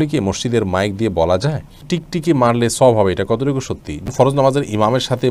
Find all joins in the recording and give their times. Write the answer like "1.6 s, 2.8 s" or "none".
1.9 s, 4.0 s